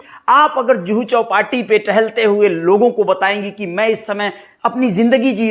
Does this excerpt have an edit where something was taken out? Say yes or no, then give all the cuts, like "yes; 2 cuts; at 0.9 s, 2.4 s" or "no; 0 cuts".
no; 0 cuts